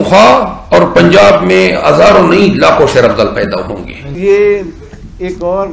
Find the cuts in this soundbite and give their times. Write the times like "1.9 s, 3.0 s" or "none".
4.1 s